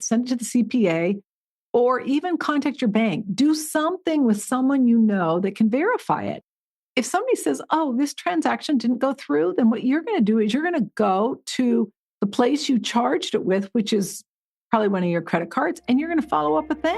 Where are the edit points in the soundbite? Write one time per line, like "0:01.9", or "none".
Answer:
none